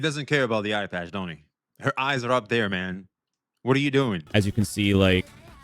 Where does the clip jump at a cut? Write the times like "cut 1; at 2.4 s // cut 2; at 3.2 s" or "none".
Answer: cut 1; at 4.3 s